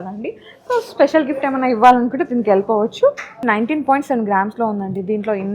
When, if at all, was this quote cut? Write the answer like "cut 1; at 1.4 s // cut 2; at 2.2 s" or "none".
cut 1; at 3.4 s